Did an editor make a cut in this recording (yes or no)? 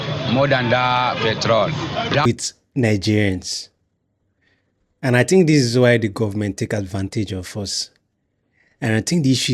yes